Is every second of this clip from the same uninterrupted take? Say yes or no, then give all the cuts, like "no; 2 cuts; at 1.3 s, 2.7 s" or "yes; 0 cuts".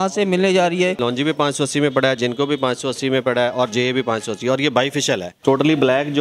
no; 2 cuts; at 1.0 s, 5.3 s